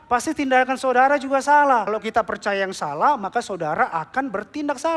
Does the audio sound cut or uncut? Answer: cut